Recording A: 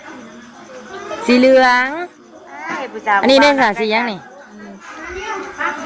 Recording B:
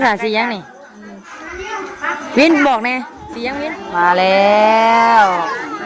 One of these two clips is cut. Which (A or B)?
B